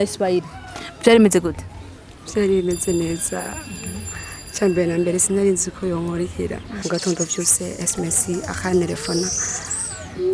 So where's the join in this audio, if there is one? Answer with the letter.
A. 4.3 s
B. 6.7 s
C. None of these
B